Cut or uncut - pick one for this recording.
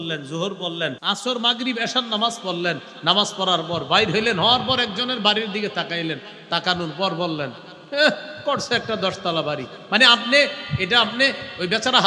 cut